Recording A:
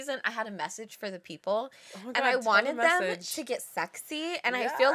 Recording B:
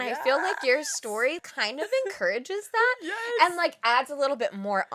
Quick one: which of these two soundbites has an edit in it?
B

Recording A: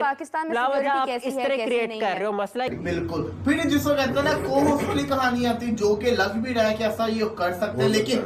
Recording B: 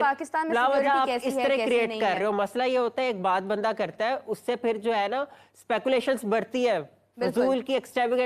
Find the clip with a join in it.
A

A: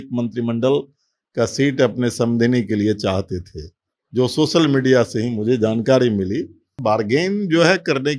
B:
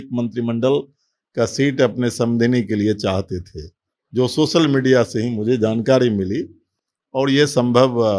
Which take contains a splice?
A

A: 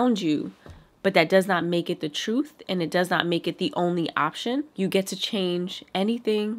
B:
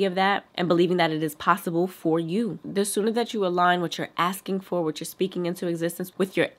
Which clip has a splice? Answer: A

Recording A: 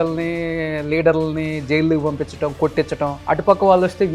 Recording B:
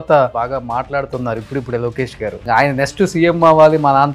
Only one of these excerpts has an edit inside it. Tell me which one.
A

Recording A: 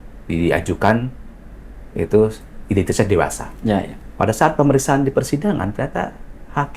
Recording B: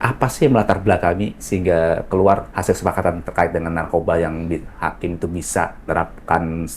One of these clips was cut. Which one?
B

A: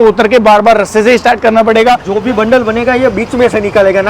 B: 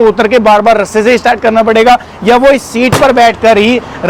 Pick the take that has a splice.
A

